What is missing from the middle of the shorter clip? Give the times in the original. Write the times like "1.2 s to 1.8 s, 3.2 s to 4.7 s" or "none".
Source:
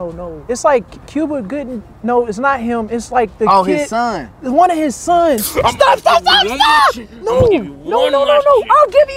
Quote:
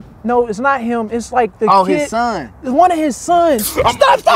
none